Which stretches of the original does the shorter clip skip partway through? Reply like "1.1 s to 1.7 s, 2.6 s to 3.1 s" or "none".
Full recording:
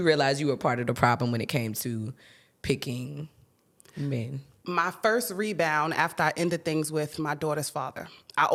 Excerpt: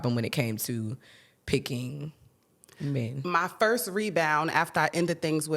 4.3 s to 4.6 s